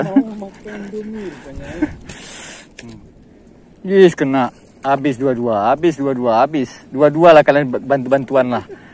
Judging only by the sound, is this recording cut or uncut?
cut